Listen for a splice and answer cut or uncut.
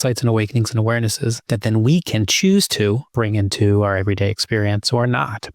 cut